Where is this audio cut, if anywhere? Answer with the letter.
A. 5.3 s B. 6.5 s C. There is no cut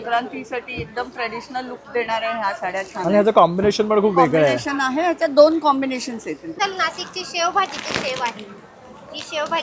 B